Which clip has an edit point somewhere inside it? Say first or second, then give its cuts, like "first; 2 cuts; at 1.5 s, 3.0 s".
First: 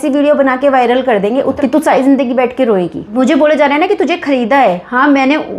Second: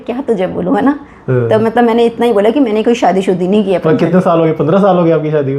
first; 2 cuts; at 1.6 s, 3.0 s